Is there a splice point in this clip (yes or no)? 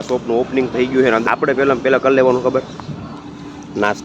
yes